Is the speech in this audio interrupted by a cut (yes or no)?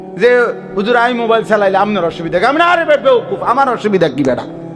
no